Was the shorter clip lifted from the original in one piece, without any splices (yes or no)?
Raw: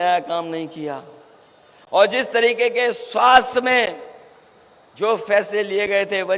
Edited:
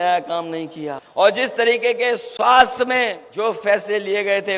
no